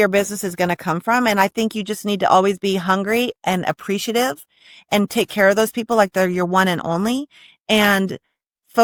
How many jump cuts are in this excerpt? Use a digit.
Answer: 0